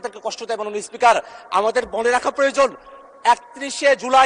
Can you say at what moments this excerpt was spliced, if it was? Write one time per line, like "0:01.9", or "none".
none